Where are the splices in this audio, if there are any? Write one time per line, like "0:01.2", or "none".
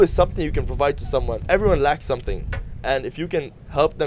0:01.4